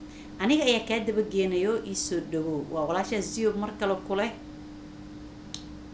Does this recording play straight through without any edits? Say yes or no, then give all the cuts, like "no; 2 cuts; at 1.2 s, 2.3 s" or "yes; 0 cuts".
yes; 0 cuts